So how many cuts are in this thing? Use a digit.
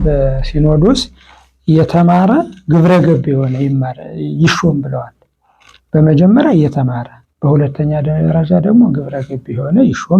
0